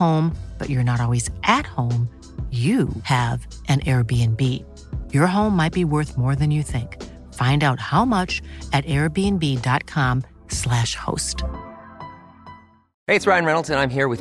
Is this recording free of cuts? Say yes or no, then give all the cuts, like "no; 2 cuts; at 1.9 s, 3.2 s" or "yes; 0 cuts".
no; 1 cut; at 12.9 s